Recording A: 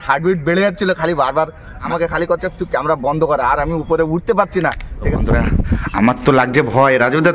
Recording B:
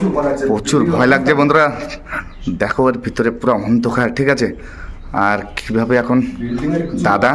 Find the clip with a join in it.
A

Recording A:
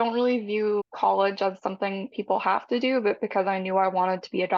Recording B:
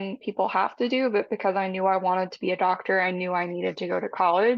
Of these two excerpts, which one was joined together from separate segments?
A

